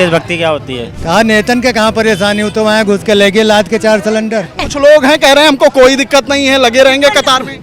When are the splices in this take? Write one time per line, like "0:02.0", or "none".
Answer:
0:00.9
0:04.7